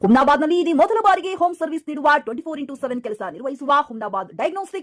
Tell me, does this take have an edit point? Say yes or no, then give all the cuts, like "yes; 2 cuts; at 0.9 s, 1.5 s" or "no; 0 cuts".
no; 0 cuts